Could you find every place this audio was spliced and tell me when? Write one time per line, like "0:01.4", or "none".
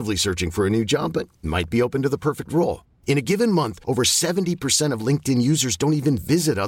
none